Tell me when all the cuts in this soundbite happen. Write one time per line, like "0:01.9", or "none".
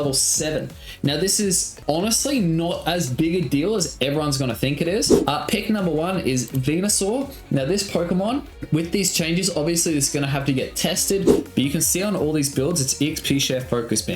0:01.7
0:05.1
0:08.6
0:11.4